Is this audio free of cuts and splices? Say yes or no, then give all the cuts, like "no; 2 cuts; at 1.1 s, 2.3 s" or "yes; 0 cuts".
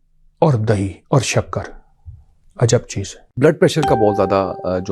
no; 1 cut; at 3.4 s